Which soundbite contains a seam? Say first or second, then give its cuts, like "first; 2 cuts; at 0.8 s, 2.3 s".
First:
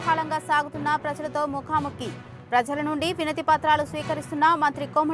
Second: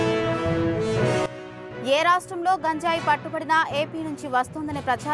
second; 1 cut; at 1.3 s